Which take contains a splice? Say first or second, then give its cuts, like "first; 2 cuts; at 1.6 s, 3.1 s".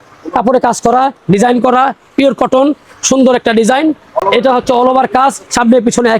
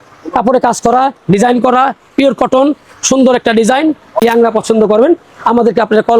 second; 1 cut; at 4.2 s